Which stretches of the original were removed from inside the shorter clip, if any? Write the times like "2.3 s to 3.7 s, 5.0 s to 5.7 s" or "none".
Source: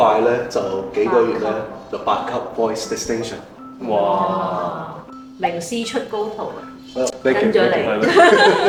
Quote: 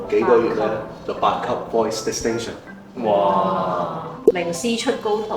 5.3 s to 5.5 s